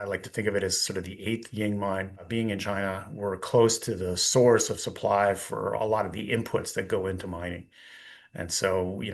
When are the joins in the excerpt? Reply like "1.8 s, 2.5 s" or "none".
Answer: 2.2 s

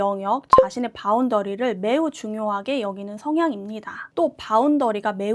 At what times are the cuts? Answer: 4.1 s

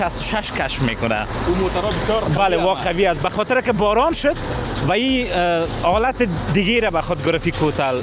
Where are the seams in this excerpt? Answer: none

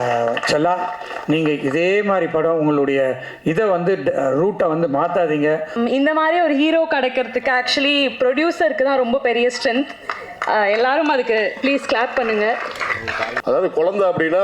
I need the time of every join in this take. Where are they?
5.7 s, 13.3 s

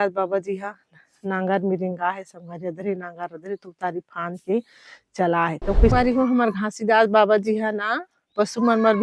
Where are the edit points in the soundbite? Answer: 5.9 s

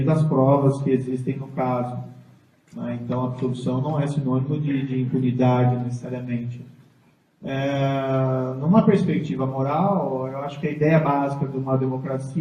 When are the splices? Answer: 6.4 s

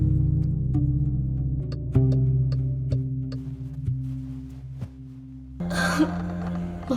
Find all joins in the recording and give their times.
1.6 s, 5.6 s

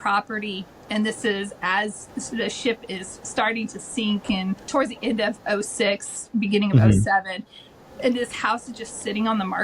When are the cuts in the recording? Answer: 2.1 s, 4.6 s

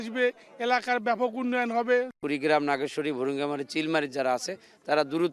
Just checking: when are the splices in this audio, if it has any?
2.2 s

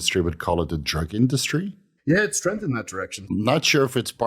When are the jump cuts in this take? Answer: 1.8 s, 3.3 s

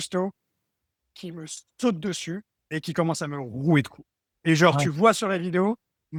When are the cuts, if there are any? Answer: none

